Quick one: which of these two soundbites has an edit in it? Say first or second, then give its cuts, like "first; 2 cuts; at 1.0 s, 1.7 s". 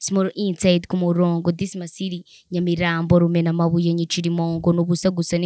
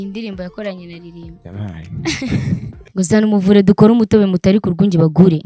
second; 1 cut; at 2.8 s